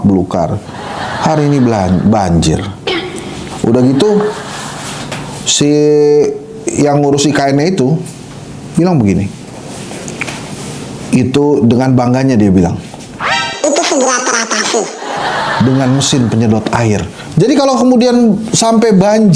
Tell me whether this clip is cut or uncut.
cut